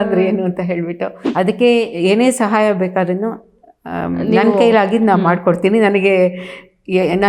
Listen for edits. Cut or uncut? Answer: cut